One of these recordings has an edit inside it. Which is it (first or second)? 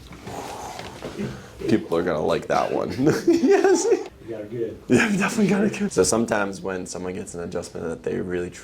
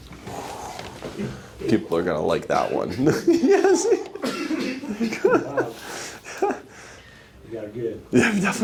first